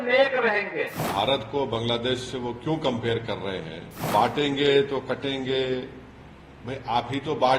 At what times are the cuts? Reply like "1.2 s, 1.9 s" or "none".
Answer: 1.0 s, 3.9 s